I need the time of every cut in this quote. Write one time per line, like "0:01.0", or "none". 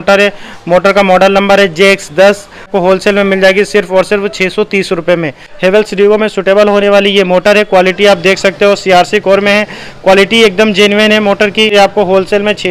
0:02.7
0:05.5
0:11.7